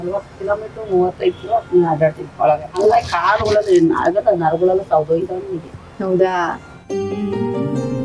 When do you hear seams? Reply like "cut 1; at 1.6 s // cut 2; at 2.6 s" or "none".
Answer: none